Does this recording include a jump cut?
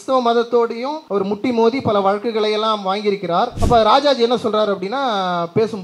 yes; 2 cuts; at 0.9 s, 3.5 s

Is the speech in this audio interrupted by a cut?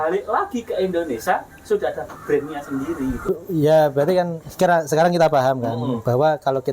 yes; 1 cut; at 3.2 s

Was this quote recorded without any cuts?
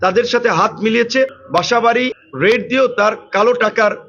no; 1 cut; at 1.4 s

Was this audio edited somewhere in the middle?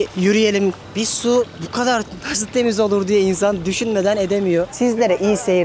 yes; 2 cuts; at 1.1 s, 4.7 s

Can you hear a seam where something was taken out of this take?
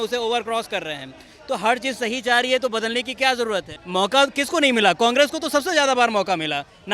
yes; 1 cut; at 3.8 s

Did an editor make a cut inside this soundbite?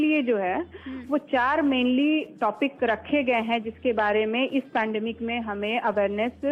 no; 0 cuts

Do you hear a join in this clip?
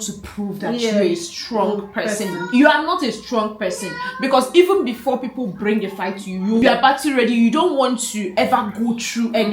yes; 1 cut; at 6.6 s

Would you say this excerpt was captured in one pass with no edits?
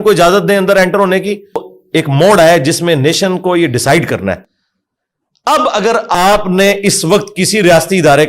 no; 1 cut; at 1.7 s

